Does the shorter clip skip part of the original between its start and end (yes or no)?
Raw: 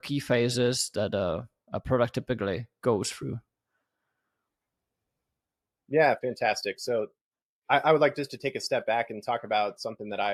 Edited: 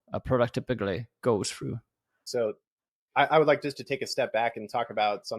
yes